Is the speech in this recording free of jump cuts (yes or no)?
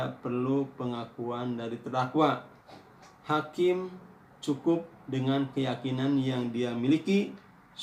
yes